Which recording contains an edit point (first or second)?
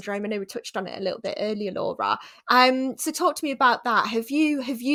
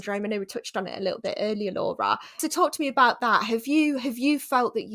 second